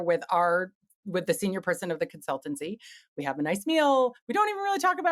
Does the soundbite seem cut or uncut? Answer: uncut